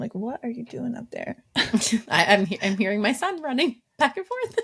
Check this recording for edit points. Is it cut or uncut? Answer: uncut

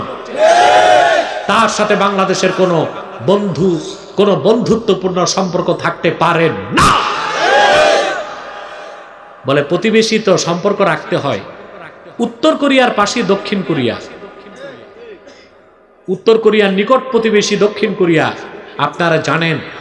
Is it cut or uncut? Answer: uncut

